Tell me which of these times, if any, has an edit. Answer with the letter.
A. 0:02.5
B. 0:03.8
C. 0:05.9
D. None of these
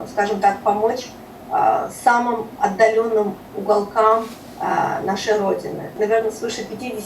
C